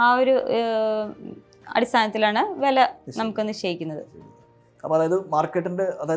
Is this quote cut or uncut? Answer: uncut